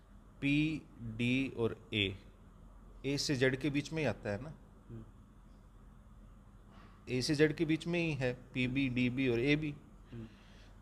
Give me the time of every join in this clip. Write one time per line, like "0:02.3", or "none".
none